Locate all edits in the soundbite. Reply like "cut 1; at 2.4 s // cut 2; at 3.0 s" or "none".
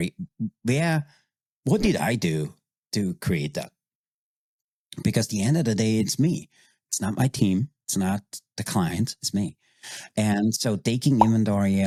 none

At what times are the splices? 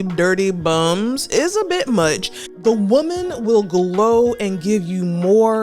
cut 1; at 2.5 s

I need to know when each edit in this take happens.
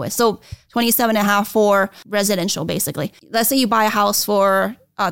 cut 1; at 2.0 s // cut 2; at 3.1 s

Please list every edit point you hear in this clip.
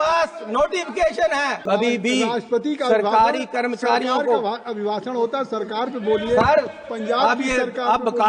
cut 1; at 1.6 s

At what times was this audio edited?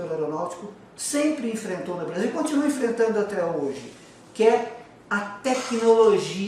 none

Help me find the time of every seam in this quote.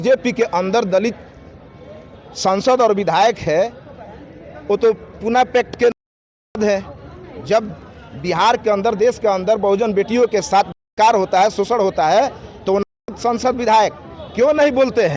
none

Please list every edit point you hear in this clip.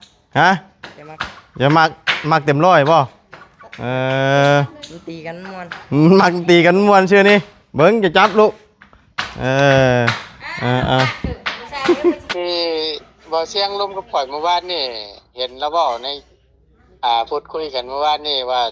cut 1; at 12.3 s

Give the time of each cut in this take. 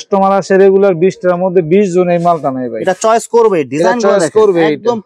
none

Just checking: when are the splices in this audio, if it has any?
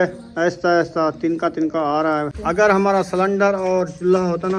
cut 1; at 2.3 s

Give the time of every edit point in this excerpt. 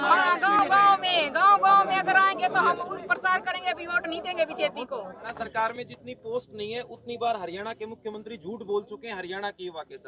cut 1; at 5.3 s

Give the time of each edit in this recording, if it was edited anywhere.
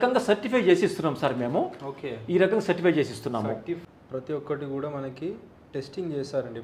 cut 1; at 3.8 s

